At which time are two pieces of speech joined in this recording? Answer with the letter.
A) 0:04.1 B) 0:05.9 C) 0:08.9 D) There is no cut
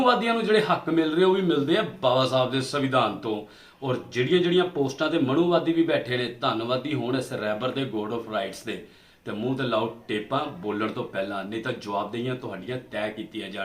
D